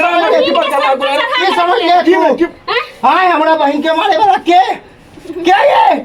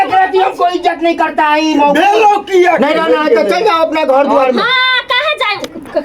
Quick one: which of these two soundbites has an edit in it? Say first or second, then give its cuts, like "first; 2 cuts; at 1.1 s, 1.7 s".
second; 1 cut; at 2.8 s